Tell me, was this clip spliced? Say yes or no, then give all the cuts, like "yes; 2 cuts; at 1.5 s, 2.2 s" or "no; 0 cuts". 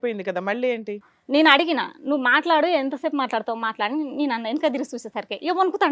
yes; 1 cut; at 1.1 s